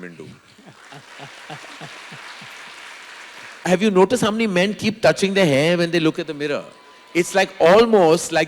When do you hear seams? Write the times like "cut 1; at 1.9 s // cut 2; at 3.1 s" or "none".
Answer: cut 1; at 3.6 s